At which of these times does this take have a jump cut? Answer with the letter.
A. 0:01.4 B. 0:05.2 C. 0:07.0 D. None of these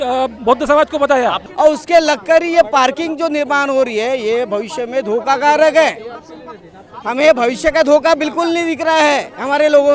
A